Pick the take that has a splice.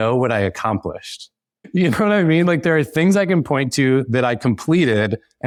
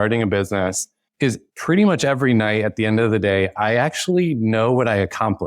second; 2 cuts; at 1.0 s, 3.5 s

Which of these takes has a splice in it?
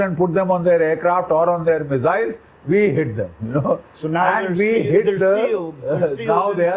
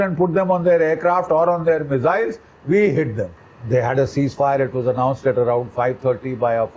second; 1 cut; at 3.4 s

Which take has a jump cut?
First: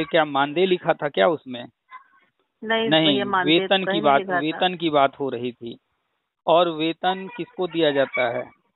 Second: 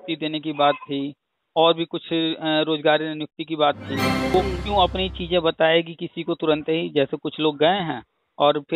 second; 1 cut; at 4.3 s

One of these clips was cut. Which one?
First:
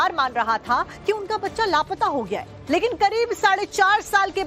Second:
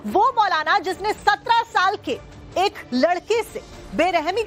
second; 1 cut; at 0.9 s

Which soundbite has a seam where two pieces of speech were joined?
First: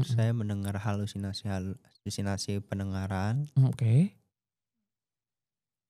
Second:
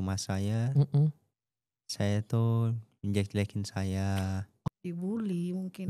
second; 1 cut; at 4.5 s

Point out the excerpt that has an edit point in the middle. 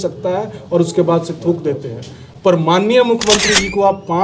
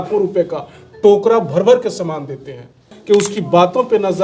second; 1 cut; at 2.9 s

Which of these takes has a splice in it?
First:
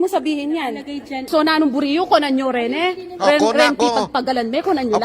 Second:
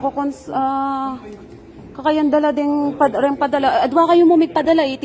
first; 1 cut; at 3.7 s

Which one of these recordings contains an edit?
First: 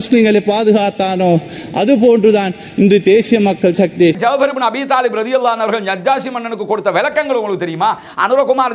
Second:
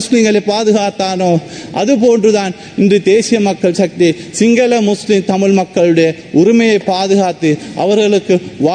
first; 1 cut; at 4.2 s

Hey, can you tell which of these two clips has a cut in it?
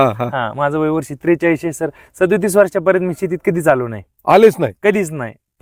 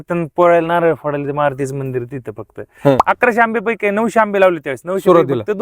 second; 1 cut; at 3.0 s

